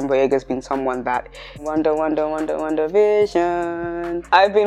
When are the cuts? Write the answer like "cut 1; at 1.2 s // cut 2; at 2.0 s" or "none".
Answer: cut 1; at 1.6 s